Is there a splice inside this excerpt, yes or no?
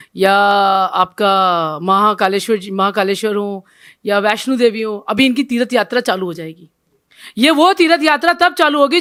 no